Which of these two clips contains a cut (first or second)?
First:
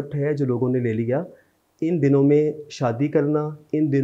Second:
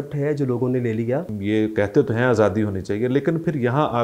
second